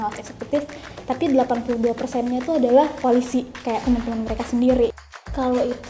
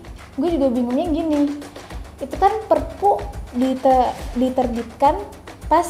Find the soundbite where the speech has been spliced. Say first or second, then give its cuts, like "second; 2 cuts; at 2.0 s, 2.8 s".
first; 2 cuts; at 3.0 s, 4.9 s